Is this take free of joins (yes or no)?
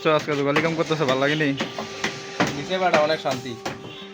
yes